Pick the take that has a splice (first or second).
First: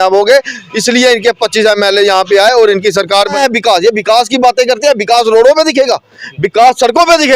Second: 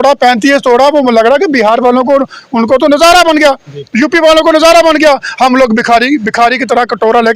first